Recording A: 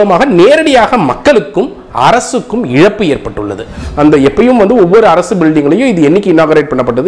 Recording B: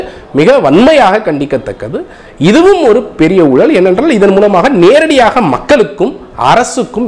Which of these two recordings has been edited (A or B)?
A